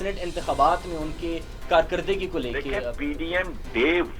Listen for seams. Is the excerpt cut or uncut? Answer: cut